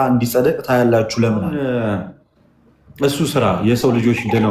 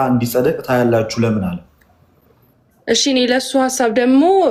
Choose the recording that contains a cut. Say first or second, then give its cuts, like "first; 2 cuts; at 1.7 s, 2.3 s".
first; 1 cut; at 1.5 s